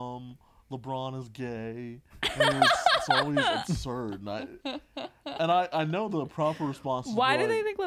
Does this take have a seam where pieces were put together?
no; 0 cuts

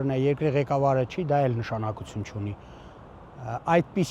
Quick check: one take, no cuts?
yes; 0 cuts

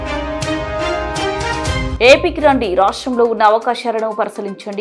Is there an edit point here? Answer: no; 0 cuts

